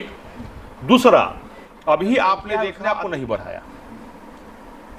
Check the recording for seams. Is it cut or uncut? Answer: cut